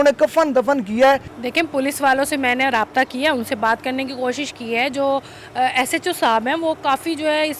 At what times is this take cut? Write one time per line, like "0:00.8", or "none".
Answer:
none